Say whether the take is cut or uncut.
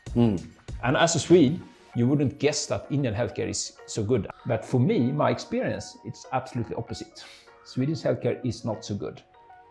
cut